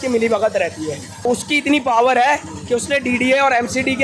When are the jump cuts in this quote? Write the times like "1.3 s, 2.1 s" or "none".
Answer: 1.1 s